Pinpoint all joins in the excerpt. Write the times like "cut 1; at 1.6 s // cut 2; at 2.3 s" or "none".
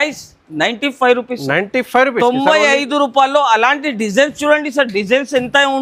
none

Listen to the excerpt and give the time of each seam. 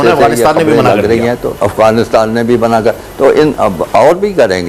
none

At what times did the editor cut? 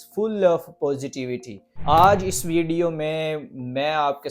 cut 1; at 1.8 s

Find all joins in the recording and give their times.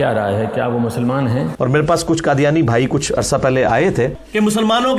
cut 1; at 1.5 s // cut 2; at 4.2 s

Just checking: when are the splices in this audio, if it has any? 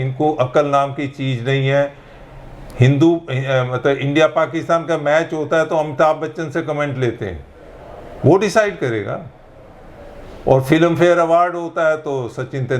none

